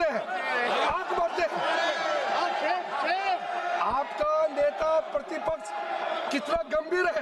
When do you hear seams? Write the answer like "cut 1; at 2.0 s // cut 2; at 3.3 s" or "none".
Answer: none